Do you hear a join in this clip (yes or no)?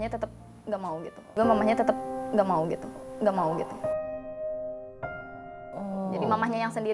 no